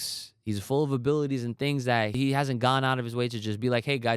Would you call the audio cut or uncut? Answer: cut